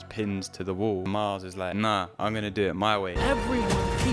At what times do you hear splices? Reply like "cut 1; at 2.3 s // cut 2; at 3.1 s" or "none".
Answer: cut 1; at 1.5 s // cut 2; at 3.2 s